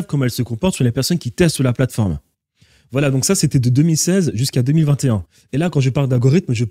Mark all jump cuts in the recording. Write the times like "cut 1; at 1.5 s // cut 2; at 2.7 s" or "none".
none